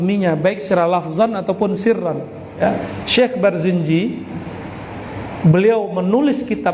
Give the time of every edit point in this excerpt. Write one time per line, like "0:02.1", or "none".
0:02.6